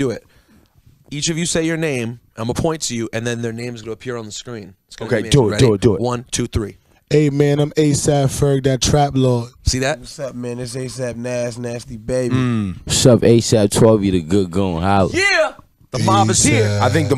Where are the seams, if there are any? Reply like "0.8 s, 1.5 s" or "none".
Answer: none